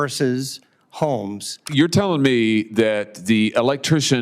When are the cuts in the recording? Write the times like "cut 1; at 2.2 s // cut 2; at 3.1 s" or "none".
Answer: cut 1; at 1.6 s